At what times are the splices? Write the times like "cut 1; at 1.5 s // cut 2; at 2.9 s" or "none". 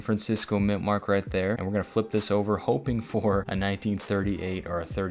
cut 1; at 1.6 s // cut 2; at 3.5 s